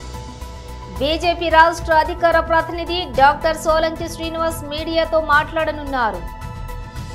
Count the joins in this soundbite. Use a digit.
2